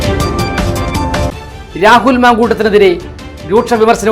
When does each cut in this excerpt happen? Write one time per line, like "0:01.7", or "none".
none

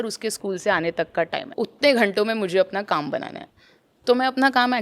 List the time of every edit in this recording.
0:01.5

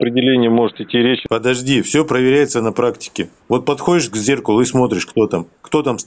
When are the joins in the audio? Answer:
0:01.2

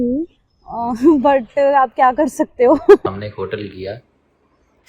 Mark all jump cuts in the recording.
0:03.0

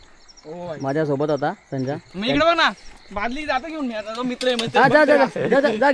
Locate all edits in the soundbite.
none

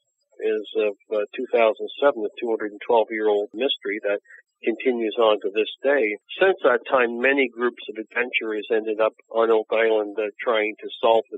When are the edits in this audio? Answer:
0:03.5
0:06.2

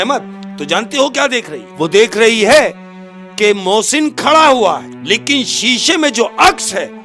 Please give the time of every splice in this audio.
0:01.6
0:04.9

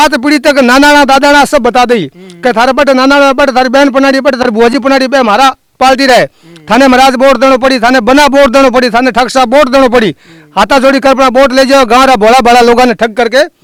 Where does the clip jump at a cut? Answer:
none

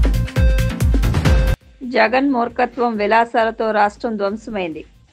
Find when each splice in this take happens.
0:01.2

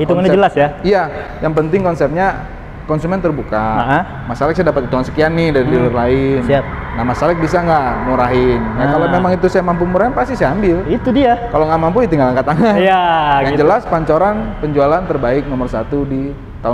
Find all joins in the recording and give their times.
none

